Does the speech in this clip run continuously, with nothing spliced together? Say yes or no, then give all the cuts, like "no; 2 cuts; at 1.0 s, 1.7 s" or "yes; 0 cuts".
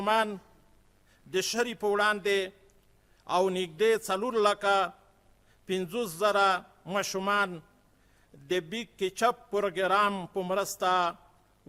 yes; 0 cuts